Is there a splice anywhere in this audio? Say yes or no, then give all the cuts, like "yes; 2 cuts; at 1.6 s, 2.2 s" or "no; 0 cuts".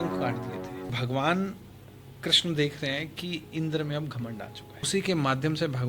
yes; 2 cuts; at 0.9 s, 4.8 s